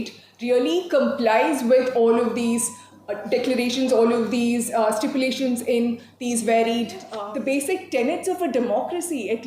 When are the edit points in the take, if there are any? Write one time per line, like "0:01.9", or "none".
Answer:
0:07.2